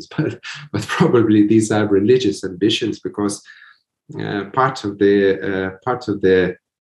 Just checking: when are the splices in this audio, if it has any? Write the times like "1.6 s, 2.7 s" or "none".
none